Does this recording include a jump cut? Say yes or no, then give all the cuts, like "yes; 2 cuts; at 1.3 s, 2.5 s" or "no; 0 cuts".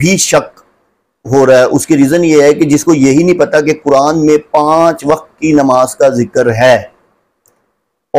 no; 0 cuts